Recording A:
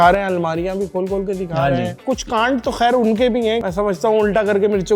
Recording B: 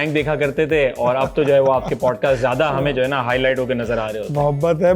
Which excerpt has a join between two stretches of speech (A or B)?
A